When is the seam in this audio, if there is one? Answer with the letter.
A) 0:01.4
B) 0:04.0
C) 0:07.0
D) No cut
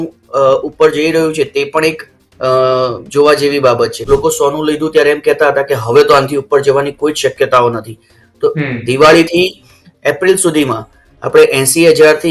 B